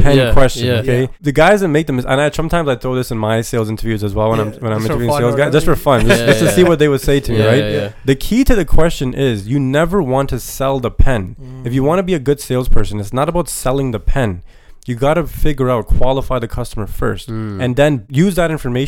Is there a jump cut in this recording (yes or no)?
yes